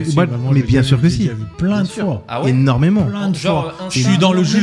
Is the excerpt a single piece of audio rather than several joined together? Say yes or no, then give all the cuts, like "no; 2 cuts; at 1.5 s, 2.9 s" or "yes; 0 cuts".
yes; 0 cuts